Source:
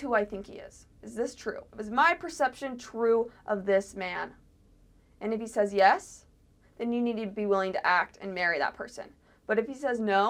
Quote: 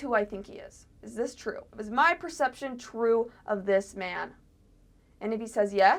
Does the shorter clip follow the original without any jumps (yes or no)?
yes